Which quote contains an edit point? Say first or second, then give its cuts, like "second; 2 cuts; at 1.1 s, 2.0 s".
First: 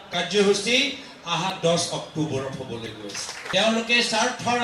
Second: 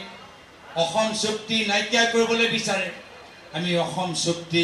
first; 1 cut; at 3.3 s